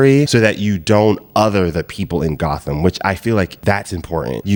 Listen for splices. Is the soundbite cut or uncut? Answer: uncut